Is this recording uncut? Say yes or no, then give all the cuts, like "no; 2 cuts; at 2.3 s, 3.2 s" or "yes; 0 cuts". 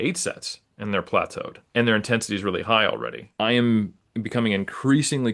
no; 1 cut; at 3.2 s